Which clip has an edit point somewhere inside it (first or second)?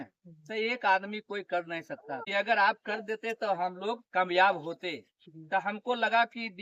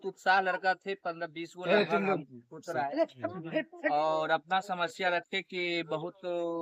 first